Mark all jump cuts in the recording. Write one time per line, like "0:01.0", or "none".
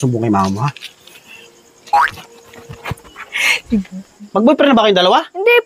0:04.2